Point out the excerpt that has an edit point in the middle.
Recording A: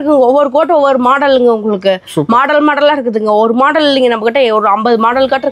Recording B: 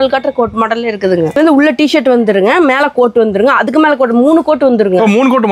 B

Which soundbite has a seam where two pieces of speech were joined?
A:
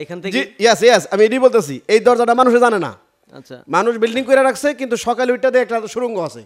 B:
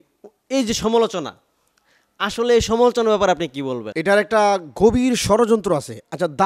B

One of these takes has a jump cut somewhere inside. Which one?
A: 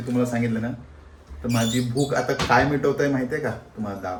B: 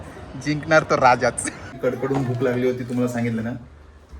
B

